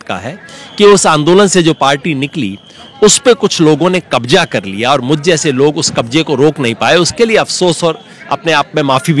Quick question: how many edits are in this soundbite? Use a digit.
0